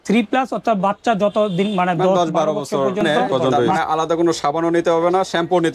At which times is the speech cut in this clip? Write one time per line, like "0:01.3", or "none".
0:03.7